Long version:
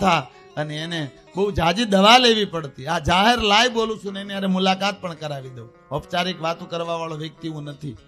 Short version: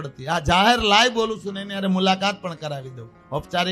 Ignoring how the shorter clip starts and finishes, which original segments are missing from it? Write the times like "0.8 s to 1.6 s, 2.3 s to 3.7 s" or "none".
none